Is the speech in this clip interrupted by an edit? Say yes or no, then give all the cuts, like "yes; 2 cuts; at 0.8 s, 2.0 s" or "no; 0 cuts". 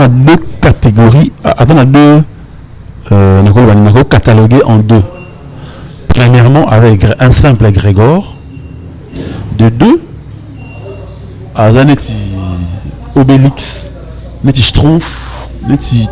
no; 0 cuts